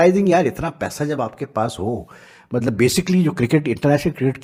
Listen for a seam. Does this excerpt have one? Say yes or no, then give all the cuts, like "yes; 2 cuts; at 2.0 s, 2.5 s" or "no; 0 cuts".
no; 0 cuts